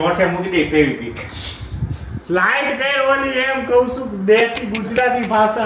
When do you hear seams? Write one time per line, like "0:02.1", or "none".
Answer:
none